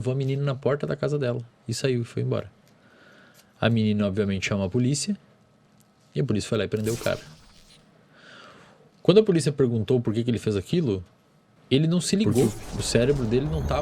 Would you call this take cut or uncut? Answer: cut